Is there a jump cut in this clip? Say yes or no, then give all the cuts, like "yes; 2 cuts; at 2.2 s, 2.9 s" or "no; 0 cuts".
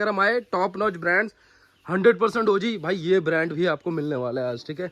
no; 0 cuts